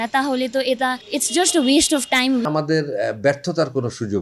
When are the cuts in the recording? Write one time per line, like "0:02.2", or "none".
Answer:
0:01.0
0:02.4